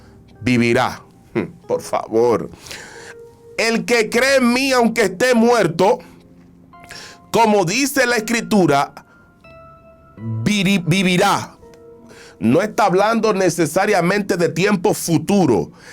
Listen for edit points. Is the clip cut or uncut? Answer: uncut